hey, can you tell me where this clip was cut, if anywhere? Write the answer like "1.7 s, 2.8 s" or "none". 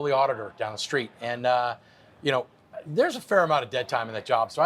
none